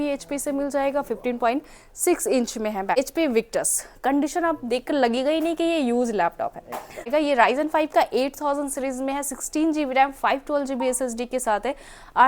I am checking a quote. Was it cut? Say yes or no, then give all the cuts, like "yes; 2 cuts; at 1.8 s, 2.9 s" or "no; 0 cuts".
yes; 2 cuts; at 3.0 s, 7.1 s